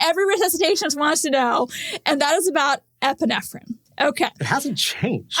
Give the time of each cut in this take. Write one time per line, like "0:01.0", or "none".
none